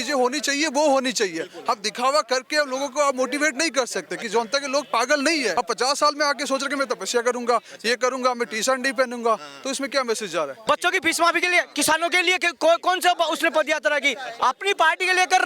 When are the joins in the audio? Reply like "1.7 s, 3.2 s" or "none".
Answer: 5.5 s, 10.6 s

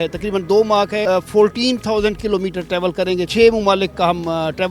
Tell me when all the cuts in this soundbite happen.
1.0 s, 3.3 s

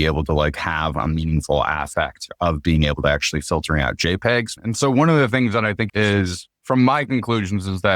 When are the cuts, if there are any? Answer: 4.5 s, 5.9 s

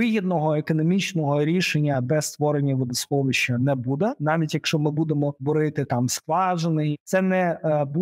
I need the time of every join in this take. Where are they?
4.2 s, 5.4 s, 6.9 s

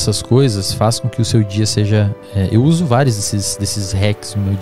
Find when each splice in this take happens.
none

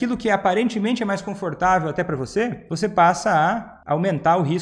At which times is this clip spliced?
2.6 s, 3.7 s

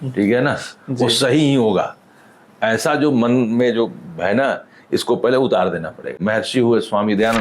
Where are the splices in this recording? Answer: 6.2 s

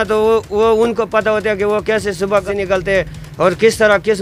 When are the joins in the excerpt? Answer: 2.4 s

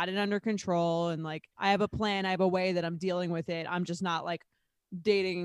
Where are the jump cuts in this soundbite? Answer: 1.5 s

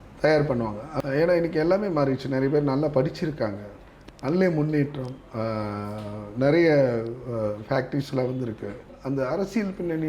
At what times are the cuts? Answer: 0.9 s, 8.9 s

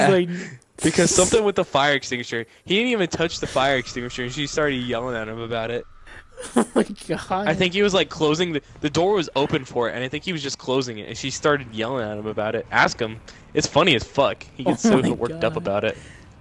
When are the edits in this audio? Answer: none

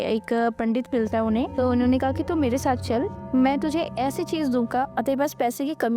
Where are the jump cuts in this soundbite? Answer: 1.5 s, 3.2 s, 4.9 s

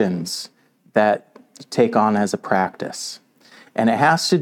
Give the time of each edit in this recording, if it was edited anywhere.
none

